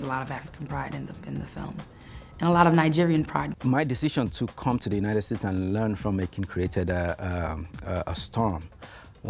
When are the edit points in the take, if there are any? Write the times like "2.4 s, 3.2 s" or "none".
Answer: 3.6 s